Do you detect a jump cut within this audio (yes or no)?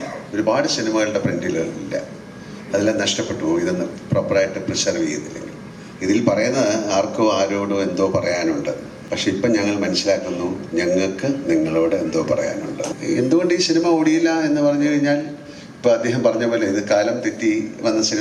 yes